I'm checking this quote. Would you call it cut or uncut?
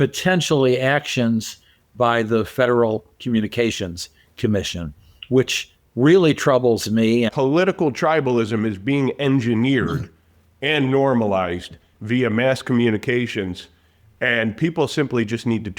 cut